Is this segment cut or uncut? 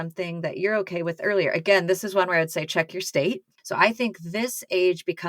cut